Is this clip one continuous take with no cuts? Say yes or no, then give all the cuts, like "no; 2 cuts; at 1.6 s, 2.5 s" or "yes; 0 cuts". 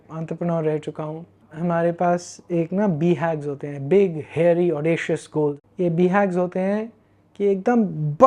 no; 1 cut; at 5.6 s